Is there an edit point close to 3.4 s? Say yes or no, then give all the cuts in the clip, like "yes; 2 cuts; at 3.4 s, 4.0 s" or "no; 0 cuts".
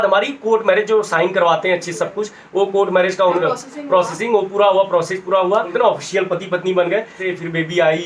yes; 3 cuts; at 3.4 s, 5.7 s, 7.2 s